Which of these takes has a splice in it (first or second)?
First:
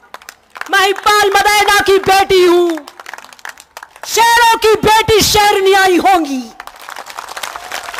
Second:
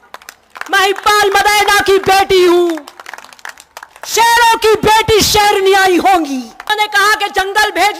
second